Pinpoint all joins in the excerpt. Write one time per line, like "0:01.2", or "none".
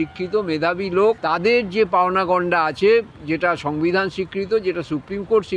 0:01.2